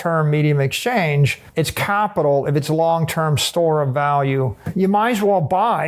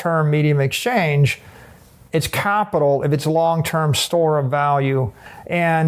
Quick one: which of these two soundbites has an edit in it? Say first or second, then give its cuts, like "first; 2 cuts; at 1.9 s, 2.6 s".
first; 2 cuts; at 1.4 s, 4.6 s